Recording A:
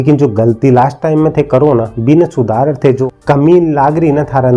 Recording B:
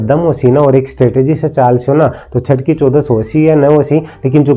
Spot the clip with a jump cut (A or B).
A